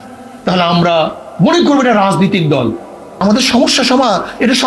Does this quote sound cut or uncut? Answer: cut